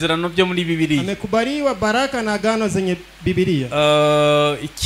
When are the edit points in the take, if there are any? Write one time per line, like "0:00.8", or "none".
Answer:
none